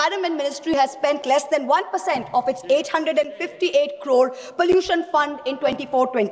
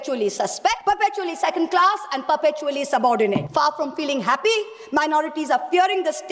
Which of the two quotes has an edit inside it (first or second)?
second